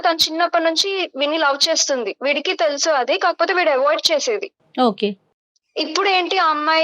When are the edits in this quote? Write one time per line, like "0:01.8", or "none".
none